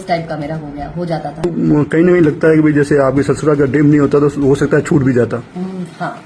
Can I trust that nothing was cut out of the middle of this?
no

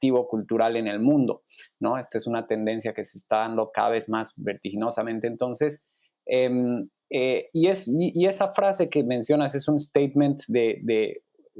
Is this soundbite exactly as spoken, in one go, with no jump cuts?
yes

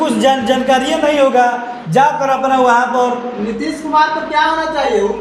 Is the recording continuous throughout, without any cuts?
yes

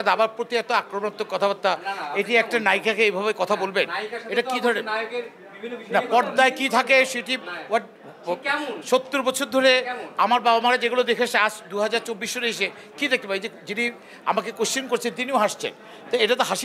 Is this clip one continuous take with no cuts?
yes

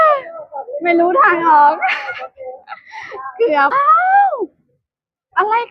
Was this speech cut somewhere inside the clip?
yes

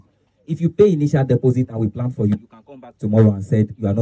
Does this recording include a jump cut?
no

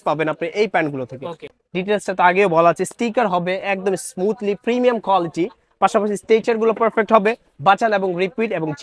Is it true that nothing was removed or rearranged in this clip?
no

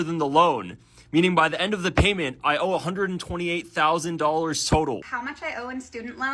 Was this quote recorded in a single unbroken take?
no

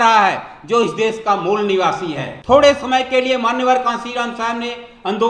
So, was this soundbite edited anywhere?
yes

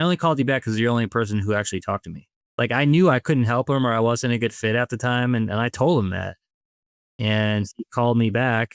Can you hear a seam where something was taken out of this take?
yes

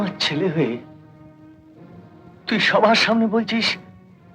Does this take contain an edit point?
no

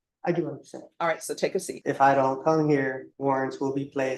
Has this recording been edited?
yes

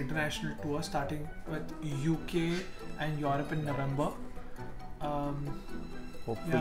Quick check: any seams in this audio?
no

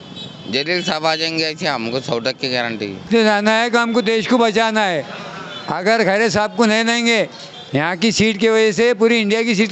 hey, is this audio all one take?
no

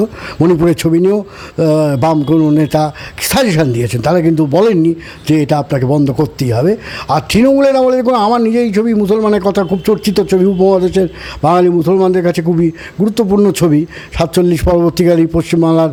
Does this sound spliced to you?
no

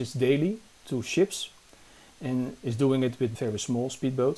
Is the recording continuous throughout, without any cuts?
no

